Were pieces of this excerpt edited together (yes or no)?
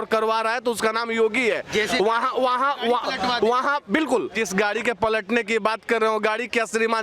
yes